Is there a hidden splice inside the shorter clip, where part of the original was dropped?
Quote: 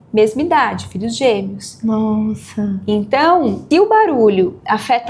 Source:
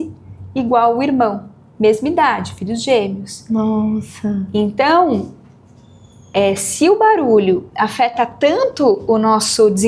yes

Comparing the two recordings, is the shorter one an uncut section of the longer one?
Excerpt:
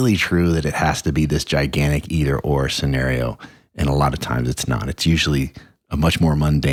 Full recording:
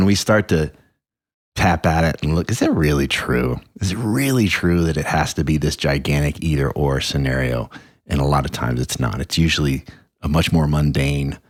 yes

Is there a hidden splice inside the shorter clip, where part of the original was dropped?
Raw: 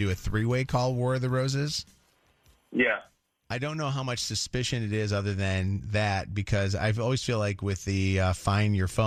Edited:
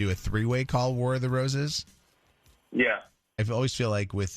yes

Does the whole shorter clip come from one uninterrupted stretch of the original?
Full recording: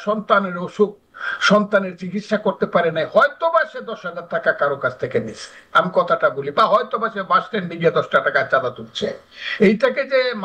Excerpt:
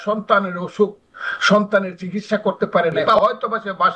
no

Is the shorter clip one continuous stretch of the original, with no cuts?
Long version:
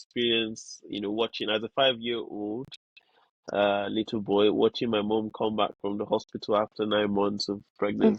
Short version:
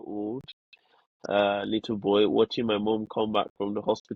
yes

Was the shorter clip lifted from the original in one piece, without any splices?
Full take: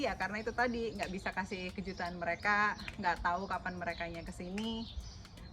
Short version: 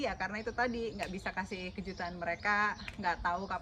yes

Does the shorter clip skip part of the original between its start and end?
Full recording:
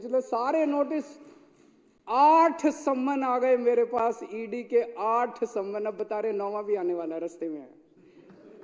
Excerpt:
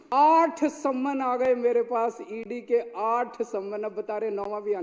no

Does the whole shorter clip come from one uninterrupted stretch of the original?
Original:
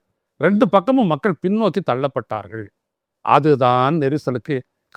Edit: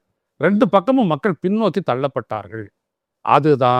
yes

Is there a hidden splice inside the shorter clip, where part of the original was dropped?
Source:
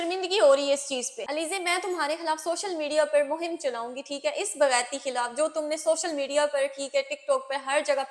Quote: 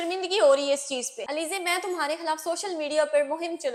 no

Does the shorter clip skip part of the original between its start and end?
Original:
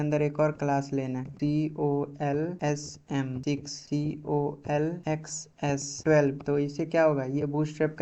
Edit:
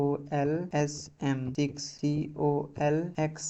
no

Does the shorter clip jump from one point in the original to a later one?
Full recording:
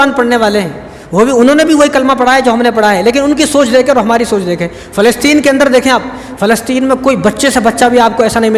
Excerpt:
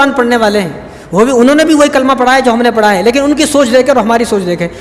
no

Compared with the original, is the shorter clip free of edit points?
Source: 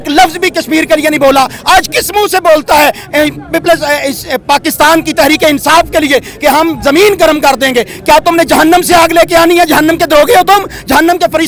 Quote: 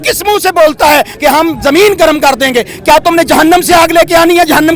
no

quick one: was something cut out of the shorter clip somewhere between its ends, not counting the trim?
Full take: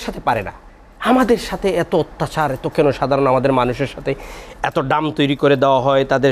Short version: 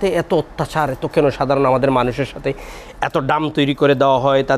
no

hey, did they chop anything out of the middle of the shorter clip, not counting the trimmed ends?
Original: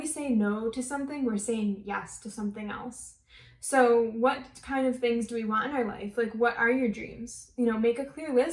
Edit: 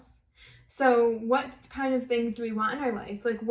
no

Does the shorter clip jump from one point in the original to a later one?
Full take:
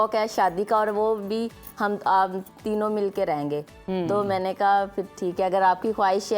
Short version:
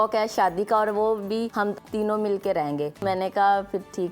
yes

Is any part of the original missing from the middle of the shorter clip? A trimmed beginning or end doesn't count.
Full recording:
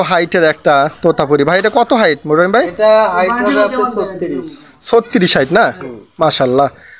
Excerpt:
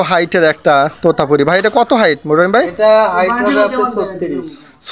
no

